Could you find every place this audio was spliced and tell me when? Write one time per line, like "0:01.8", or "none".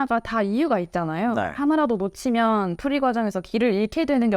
none